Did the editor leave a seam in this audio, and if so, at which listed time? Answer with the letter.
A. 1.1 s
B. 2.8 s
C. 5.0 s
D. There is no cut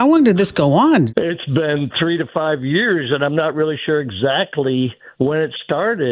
A